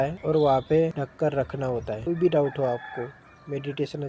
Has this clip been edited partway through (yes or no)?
no